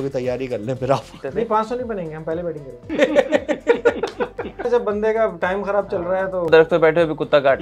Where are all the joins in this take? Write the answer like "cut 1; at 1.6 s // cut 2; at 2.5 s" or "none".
cut 1; at 1.2 s // cut 2; at 2.8 s // cut 3; at 4.7 s // cut 4; at 6.5 s